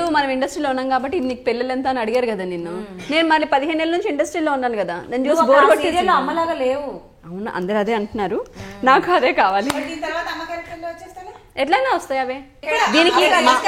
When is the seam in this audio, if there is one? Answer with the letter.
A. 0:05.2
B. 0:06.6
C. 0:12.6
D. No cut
C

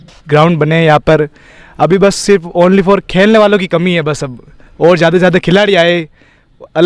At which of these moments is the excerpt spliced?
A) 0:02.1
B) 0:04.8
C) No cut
C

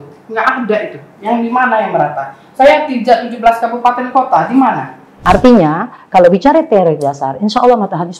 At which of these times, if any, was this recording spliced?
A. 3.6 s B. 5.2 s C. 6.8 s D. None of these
B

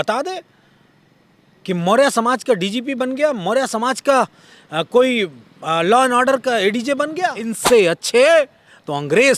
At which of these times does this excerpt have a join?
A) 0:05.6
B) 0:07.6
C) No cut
B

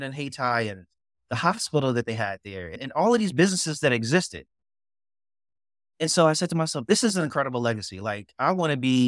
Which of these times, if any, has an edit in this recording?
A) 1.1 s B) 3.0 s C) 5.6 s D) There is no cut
D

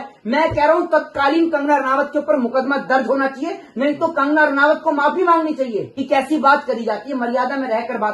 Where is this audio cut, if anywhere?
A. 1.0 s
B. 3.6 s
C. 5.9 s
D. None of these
C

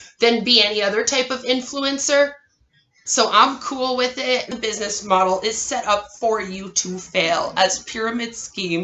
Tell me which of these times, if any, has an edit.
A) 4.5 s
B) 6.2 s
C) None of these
A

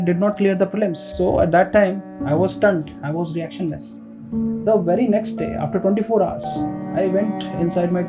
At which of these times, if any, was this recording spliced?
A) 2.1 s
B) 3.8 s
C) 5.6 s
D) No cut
A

